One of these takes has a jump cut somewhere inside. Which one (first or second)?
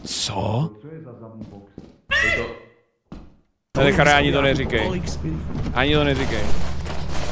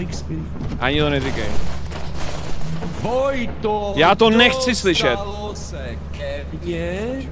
first